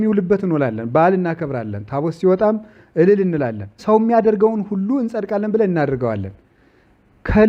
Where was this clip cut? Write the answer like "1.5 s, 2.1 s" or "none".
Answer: 3.8 s